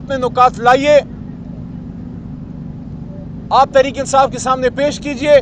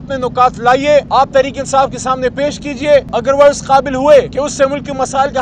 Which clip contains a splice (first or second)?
second